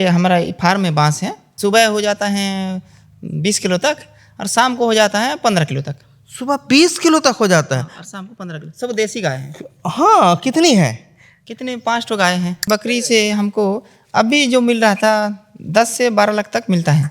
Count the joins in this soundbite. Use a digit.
2